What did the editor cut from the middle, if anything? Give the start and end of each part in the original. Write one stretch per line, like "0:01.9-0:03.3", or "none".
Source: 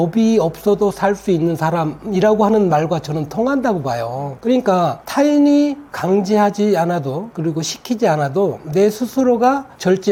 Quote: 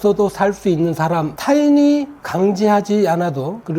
0:02.0-0:05.0